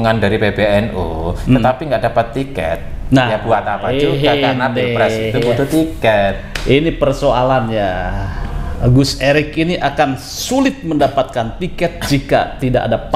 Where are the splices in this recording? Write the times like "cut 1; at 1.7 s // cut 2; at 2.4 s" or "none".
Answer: none